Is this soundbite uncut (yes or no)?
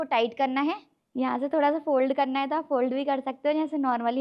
no